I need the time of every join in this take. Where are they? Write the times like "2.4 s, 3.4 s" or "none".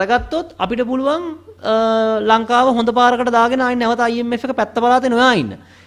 none